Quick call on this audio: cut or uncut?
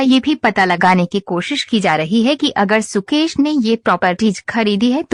uncut